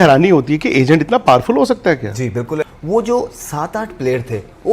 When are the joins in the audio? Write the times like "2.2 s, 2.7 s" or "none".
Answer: 2.6 s